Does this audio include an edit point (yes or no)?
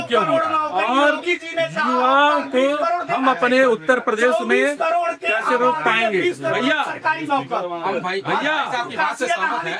no